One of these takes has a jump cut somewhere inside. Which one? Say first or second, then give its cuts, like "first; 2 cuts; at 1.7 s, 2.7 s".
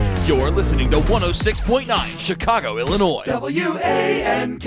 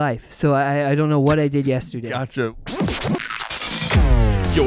second; 1 cut; at 2.5 s